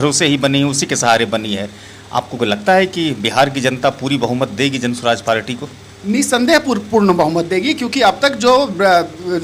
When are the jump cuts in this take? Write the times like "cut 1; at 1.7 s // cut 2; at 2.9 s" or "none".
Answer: none